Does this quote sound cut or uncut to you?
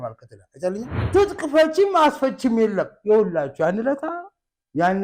cut